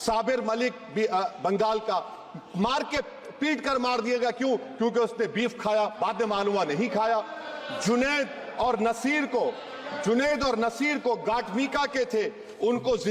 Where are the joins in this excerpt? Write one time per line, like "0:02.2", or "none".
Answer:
none